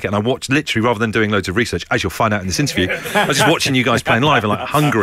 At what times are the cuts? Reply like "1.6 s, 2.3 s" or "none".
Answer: none